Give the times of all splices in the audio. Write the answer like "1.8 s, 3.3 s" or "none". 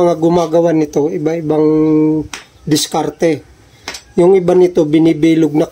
none

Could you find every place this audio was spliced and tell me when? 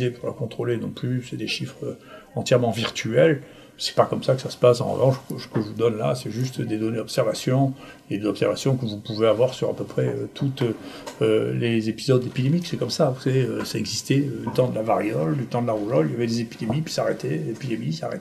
none

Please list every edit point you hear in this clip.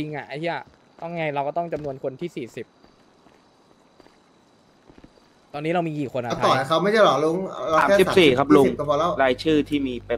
none

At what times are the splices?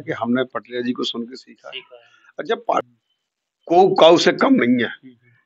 2.8 s

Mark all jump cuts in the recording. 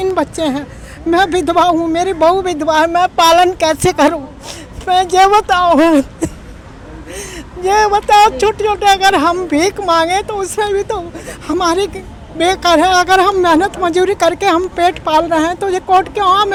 none

